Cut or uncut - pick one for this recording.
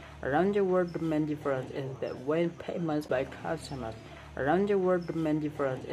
cut